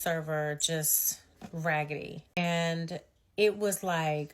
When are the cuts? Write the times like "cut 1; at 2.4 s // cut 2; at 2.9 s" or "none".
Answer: cut 1; at 2.4 s